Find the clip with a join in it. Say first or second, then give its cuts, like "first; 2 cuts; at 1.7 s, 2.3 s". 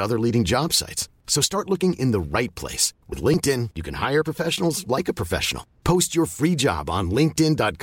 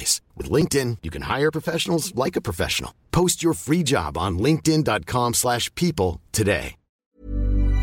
second; 1 cut; at 6.8 s